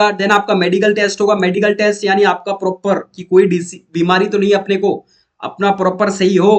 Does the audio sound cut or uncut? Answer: uncut